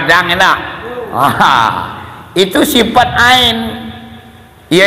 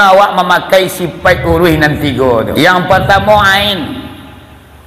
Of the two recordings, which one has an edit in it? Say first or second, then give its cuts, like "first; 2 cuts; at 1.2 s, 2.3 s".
second; 1 cut; at 2.5 s